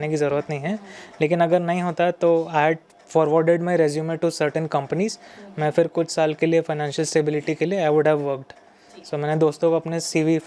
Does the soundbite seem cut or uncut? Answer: uncut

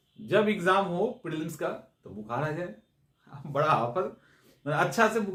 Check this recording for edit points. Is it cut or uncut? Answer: uncut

